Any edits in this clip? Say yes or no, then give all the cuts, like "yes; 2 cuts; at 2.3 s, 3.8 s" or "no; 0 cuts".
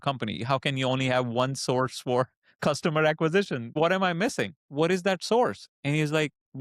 yes; 2 cuts; at 3.7 s, 4.6 s